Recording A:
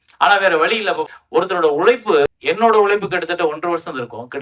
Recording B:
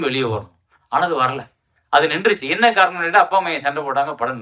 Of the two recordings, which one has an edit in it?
A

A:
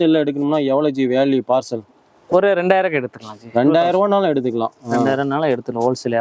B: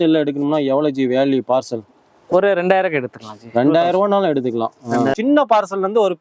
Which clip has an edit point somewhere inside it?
B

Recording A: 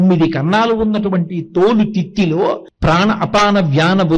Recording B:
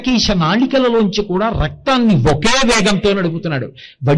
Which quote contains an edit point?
A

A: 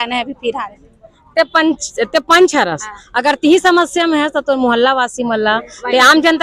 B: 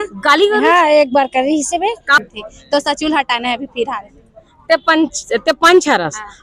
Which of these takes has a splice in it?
B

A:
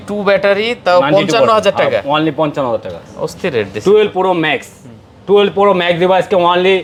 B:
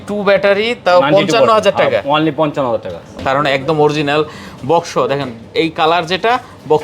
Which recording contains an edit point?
B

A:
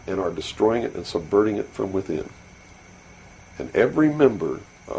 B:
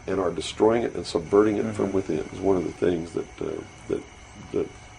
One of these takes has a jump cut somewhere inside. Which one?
B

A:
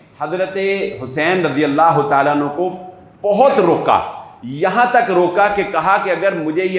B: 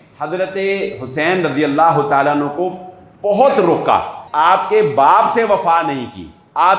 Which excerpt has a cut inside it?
B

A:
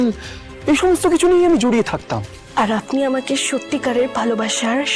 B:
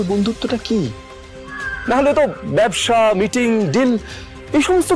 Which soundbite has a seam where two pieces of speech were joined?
A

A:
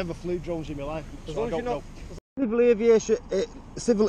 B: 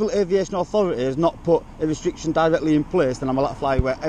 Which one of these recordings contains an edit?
A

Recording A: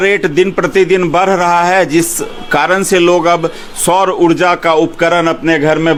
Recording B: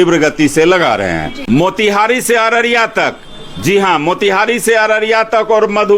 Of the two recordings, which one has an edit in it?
B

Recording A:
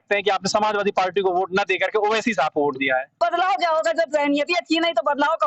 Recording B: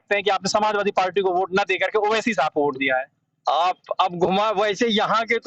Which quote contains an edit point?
A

